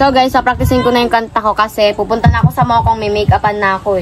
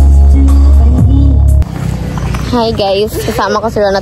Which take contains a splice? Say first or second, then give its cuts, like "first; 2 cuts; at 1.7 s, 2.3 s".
second; 1 cut; at 1.7 s